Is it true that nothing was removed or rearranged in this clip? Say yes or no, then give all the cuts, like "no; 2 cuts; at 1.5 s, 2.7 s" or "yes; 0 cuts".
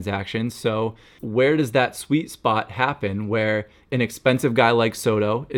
no; 2 cuts; at 1.1 s, 3.9 s